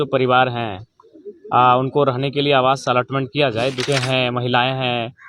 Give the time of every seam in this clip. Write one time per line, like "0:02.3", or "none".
0:03.8